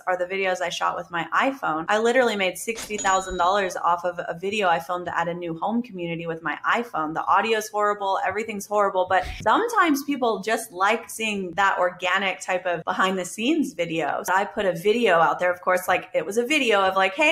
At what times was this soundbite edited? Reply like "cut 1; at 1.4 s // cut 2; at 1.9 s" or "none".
cut 1; at 1.8 s // cut 2; at 9.3 s // cut 3; at 11.5 s // cut 4; at 12.8 s // cut 5; at 14.3 s